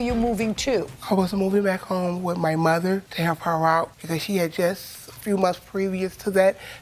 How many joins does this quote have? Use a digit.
1